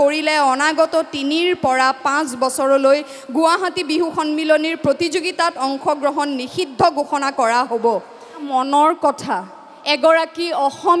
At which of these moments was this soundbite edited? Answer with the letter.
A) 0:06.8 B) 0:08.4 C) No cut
B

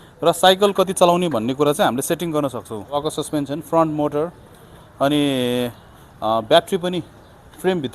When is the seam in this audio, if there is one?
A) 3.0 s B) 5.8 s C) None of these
A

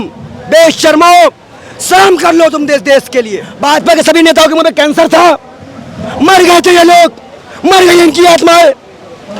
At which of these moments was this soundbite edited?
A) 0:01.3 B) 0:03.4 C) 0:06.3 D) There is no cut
B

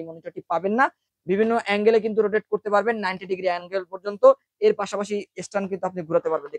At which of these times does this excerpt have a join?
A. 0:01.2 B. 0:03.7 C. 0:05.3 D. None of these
A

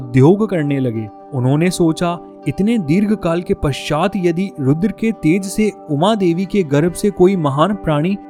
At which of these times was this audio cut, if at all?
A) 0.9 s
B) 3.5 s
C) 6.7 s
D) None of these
D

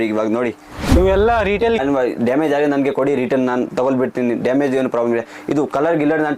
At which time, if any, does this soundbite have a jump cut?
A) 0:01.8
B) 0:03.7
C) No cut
A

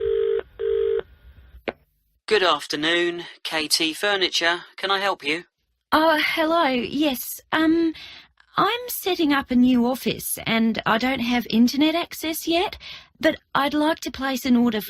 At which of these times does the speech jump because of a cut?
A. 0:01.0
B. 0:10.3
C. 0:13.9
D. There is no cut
A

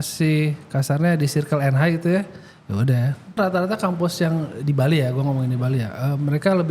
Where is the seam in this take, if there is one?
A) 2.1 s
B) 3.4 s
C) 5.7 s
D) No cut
B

